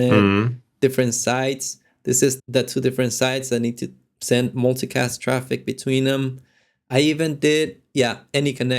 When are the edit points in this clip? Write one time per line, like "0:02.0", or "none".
0:02.4